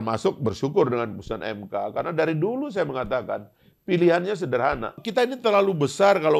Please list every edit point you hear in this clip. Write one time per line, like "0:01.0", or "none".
0:04.9